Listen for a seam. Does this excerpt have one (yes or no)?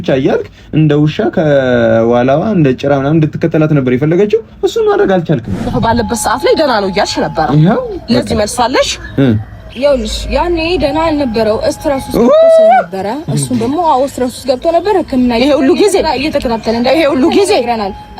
yes